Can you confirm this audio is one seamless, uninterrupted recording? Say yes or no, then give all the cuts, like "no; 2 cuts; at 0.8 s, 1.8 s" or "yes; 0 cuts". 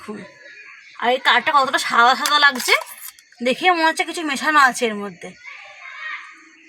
yes; 0 cuts